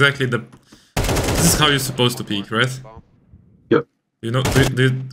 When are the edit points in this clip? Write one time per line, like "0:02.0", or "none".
none